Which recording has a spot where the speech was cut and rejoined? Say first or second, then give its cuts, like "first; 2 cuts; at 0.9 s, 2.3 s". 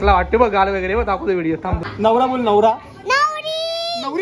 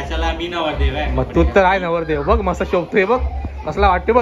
first; 1 cut; at 1.9 s